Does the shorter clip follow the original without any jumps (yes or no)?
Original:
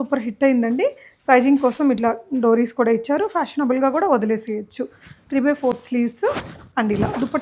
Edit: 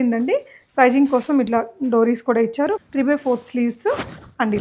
no